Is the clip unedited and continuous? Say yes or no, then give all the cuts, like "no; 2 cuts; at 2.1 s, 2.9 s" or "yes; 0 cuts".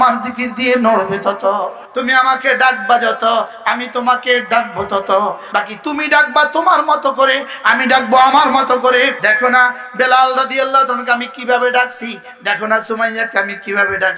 no; 3 cuts; at 1.8 s, 5.4 s, 9.2 s